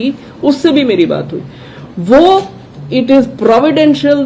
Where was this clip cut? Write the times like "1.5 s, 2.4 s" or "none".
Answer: none